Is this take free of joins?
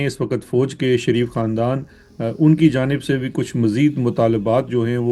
yes; 0 cuts

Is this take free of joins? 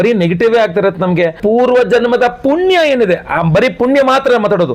no; 1 cut; at 1.4 s

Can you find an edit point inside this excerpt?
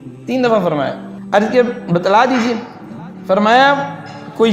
yes; 1 cut; at 1.1 s

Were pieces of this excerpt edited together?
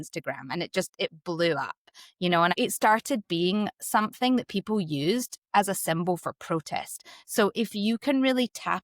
yes; 1 cut; at 2.5 s

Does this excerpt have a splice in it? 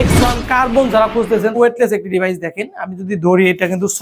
yes; 1 cut; at 1.5 s

